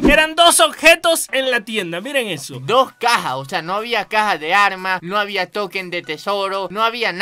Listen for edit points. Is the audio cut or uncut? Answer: uncut